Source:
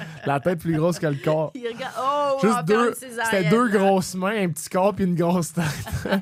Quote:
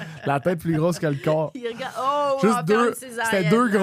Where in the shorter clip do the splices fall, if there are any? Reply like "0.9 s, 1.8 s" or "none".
none